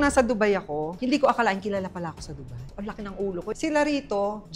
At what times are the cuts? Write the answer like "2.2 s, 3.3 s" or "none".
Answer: 0.9 s, 3.5 s